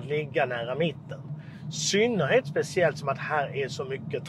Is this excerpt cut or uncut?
uncut